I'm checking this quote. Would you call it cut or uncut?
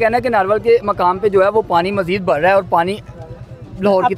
uncut